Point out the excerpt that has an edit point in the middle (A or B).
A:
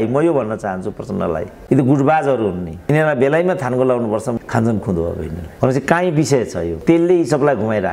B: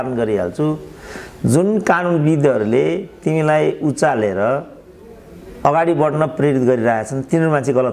A